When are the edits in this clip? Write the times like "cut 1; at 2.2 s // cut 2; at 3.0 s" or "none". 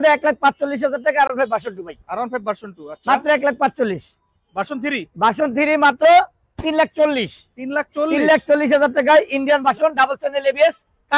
none

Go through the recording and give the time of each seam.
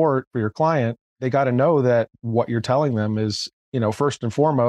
none

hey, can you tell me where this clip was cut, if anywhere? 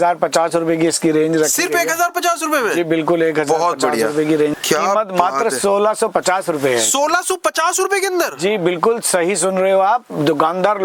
cut 1; at 4.5 s

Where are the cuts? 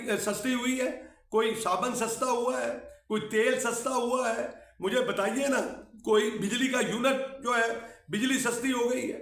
none

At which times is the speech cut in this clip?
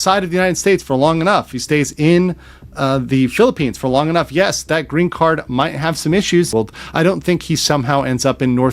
cut 1; at 6.5 s

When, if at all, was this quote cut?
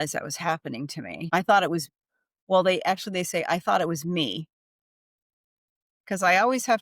cut 1; at 1.0 s

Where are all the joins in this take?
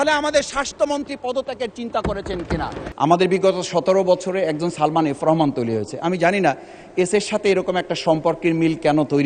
cut 1; at 2.8 s

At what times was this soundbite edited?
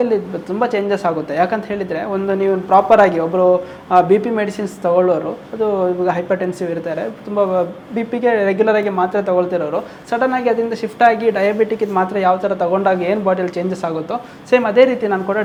none

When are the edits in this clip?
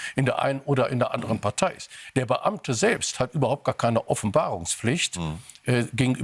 none

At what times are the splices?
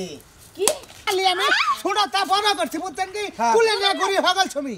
cut 1; at 1.0 s

